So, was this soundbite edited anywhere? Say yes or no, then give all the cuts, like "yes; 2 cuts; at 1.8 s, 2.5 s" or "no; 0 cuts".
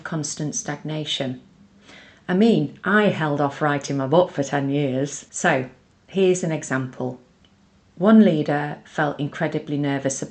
yes; 1 cut; at 5.2 s